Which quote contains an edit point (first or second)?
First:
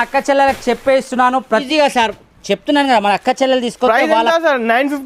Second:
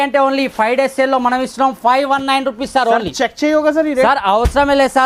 first